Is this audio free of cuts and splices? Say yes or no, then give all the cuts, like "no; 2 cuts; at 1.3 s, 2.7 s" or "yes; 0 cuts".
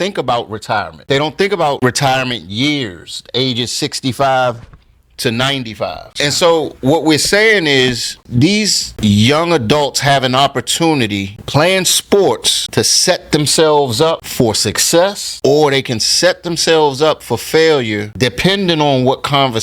no; 2 cuts; at 1.0 s, 6.0 s